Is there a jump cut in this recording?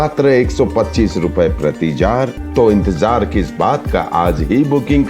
yes; 1 cut; at 2.4 s

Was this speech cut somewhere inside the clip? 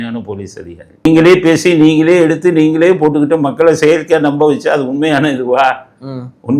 yes; 1 cut; at 1.1 s

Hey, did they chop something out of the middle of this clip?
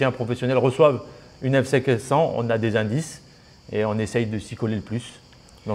no; 0 cuts

